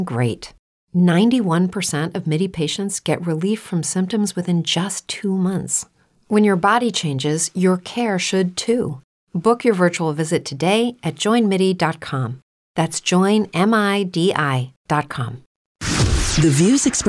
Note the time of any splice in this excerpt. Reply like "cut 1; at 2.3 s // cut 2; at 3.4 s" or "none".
cut 1; at 15.7 s